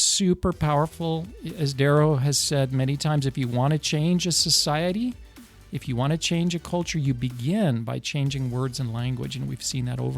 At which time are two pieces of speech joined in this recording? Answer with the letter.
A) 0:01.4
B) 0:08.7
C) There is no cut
A